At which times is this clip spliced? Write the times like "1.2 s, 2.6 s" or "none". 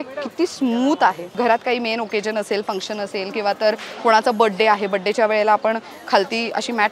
1.3 s